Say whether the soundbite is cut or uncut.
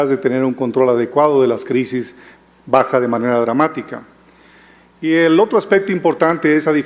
cut